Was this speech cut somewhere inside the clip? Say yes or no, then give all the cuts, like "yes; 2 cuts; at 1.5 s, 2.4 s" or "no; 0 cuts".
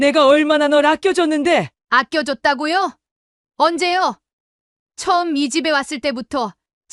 no; 0 cuts